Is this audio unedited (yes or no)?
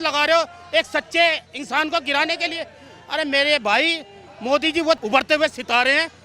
no